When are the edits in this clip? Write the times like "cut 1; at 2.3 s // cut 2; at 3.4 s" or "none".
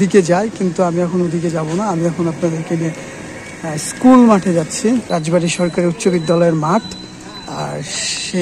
cut 1; at 5.1 s